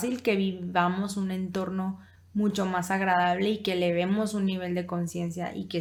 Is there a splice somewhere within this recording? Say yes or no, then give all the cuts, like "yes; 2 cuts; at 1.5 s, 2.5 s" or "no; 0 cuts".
no; 0 cuts